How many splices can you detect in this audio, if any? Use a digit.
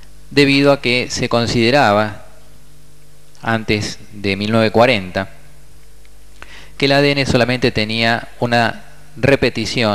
1